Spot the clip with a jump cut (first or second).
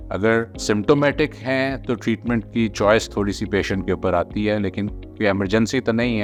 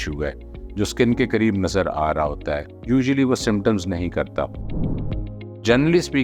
second